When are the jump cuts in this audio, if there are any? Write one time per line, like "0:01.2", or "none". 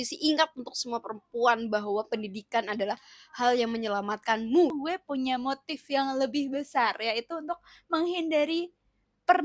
0:04.7